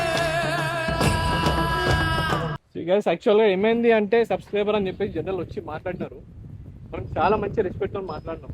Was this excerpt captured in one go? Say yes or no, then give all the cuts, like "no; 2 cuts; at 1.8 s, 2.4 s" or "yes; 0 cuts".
no; 1 cut; at 2.6 s